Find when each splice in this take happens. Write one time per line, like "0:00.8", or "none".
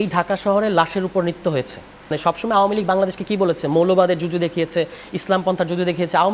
0:02.2